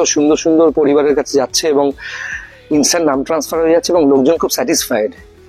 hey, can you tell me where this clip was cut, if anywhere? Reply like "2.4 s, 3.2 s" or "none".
none